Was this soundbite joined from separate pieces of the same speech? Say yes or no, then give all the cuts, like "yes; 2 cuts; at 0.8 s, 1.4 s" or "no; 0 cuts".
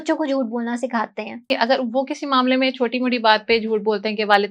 yes; 1 cut; at 1.5 s